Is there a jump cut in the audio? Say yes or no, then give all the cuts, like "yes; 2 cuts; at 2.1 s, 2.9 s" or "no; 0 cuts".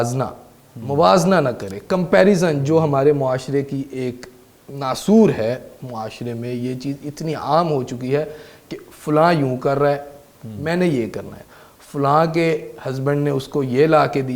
no; 0 cuts